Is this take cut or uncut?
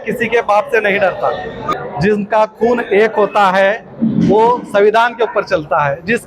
cut